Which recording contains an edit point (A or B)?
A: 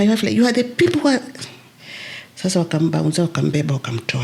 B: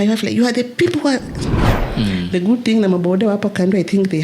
B